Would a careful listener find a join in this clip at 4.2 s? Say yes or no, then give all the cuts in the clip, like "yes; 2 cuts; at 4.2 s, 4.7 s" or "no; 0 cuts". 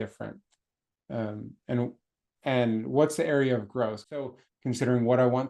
yes; 1 cut; at 4.2 s